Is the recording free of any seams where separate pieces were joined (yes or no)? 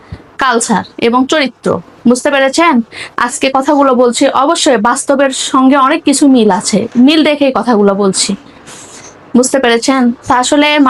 yes